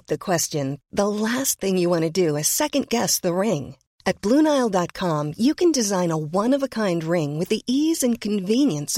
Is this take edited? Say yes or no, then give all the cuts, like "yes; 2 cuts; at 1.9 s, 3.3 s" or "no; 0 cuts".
no; 0 cuts